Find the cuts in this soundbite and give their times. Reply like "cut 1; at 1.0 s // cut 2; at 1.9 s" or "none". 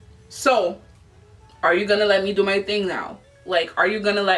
none